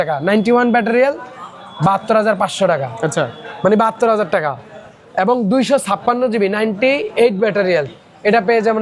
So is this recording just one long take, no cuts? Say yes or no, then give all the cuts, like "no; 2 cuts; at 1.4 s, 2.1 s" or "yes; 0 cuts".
yes; 0 cuts